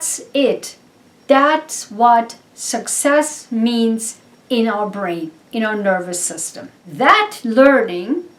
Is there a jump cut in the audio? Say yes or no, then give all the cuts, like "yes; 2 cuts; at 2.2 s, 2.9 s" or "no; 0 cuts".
no; 0 cuts